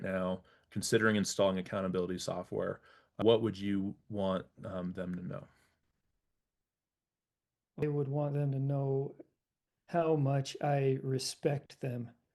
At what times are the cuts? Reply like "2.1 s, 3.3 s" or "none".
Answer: 3.2 s, 7.8 s